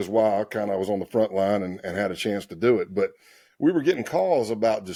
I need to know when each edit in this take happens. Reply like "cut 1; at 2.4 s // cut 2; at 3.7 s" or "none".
none